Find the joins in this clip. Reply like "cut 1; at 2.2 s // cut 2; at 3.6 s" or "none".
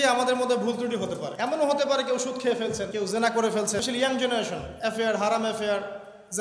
cut 1; at 1.3 s // cut 2; at 2.9 s // cut 3; at 3.8 s